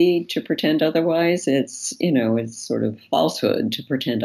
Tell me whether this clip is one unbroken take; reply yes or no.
yes